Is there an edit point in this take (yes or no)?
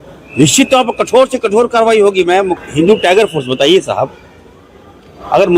yes